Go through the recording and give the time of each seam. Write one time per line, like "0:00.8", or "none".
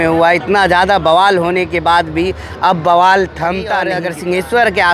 0:04.0